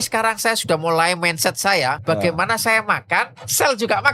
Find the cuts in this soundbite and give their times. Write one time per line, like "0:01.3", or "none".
0:02.0